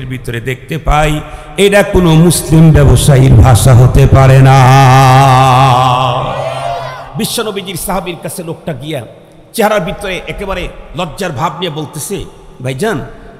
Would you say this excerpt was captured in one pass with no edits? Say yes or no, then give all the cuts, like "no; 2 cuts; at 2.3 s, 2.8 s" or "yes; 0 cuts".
no; 1 cut; at 7.0 s